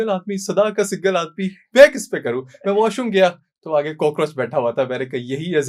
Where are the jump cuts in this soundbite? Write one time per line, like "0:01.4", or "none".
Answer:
none